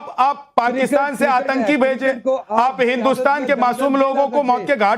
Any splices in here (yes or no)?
yes